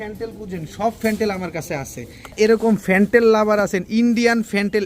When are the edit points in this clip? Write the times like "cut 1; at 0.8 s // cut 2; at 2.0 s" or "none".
cut 1; at 2.3 s

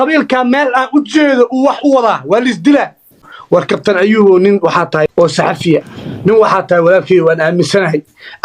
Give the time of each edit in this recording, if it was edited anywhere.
cut 1; at 3.3 s // cut 2; at 5.1 s

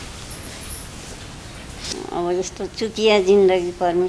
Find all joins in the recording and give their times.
cut 1; at 1.9 s

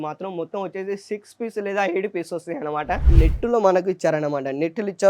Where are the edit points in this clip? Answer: cut 1; at 3.1 s

